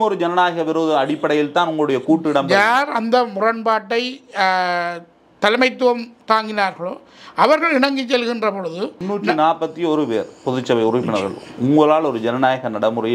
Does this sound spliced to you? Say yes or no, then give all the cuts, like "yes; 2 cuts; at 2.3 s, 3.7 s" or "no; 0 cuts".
yes; 1 cut; at 9.0 s